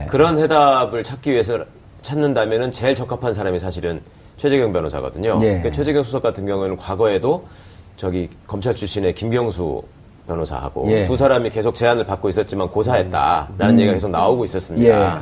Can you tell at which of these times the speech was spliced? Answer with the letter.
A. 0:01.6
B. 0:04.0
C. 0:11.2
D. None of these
C